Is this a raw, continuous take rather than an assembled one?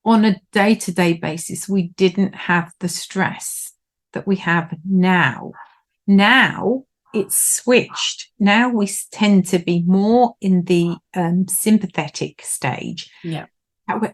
yes; 0 cuts

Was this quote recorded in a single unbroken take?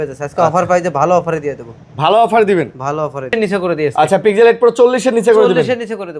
no; 1 cut; at 3.3 s

